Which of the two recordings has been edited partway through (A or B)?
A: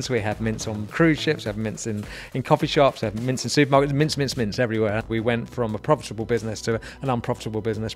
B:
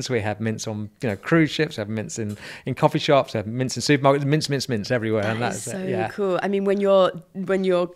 A